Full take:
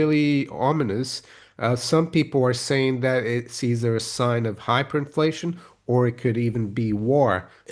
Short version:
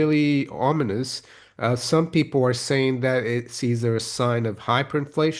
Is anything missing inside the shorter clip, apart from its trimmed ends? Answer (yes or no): no